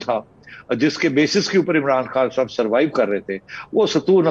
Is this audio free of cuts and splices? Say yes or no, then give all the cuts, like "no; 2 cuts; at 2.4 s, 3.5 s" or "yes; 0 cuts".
yes; 0 cuts